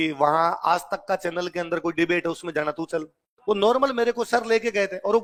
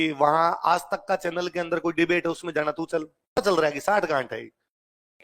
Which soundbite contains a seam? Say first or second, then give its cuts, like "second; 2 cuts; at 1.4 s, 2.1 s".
second; 1 cut; at 3.4 s